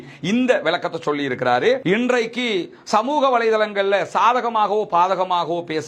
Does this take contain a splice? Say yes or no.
yes